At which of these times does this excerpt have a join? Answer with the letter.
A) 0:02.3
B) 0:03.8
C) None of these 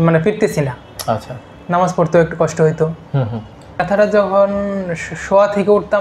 B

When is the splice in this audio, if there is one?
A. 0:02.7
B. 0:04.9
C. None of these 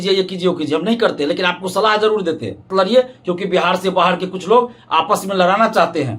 A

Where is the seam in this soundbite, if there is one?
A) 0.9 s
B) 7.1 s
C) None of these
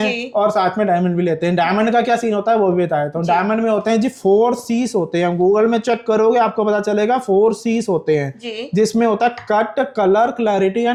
C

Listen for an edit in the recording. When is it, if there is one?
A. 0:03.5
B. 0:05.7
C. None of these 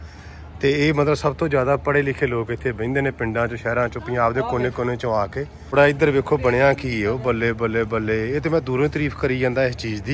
B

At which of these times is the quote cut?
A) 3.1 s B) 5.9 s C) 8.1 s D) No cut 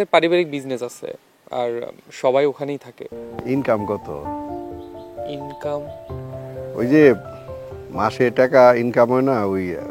A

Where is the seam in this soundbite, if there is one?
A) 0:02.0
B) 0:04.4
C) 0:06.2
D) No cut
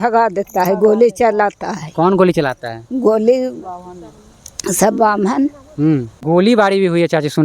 C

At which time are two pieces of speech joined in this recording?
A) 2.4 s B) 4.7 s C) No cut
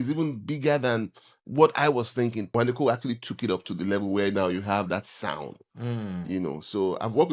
A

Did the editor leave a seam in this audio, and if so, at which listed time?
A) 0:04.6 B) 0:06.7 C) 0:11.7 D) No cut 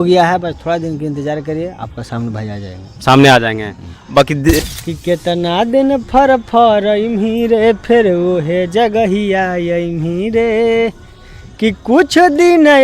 A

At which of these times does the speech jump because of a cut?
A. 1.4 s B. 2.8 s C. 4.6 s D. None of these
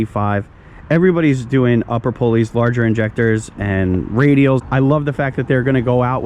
C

